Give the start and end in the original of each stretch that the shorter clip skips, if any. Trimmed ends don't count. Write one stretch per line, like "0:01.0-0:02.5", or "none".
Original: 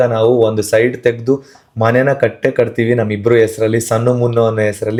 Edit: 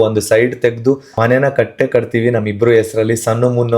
0:01.5-0:01.7